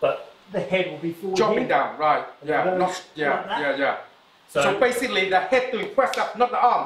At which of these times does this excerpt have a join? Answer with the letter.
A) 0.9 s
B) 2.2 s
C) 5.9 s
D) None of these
D